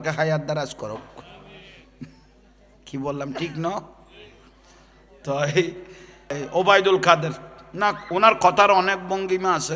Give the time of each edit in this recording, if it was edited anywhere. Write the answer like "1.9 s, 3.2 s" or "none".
6.4 s